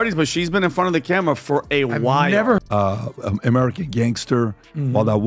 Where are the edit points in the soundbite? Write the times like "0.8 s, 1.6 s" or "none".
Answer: 2.7 s